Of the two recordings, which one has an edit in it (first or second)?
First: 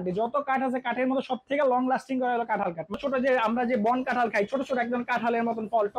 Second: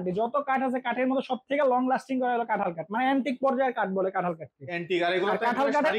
first